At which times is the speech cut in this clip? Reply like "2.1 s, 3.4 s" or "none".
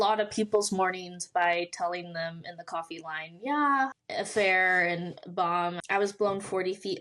4.0 s, 5.8 s